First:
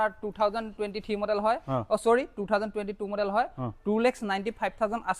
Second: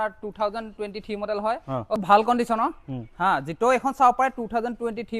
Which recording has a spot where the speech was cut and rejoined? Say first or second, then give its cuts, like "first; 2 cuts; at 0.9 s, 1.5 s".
second; 1 cut; at 2.0 s